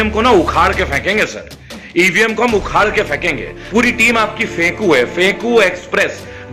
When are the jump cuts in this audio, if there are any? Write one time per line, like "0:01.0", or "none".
0:03.5